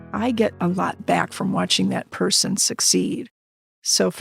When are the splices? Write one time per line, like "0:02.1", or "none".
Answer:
none